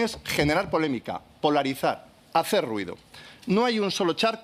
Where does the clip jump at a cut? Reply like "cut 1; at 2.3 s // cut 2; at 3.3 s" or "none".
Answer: none

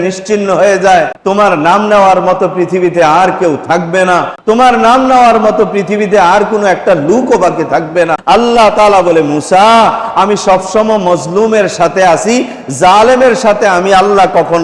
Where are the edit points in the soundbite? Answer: cut 1; at 1.2 s // cut 2; at 4.3 s // cut 3; at 8.2 s

